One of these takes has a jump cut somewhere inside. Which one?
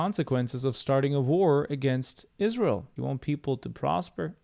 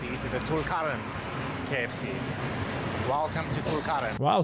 first; 1 cut; at 2.9 s

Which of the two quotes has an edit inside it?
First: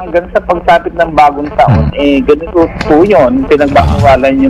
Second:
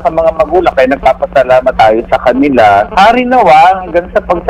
second; 2 cuts; at 1.7 s, 2.9 s

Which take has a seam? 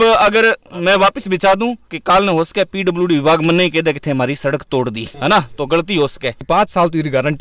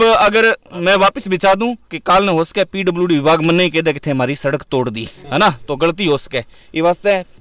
first; 2 cuts; at 5.1 s, 6.4 s

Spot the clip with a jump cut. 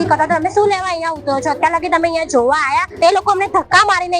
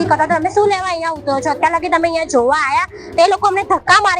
first; 1 cut; at 2.9 s

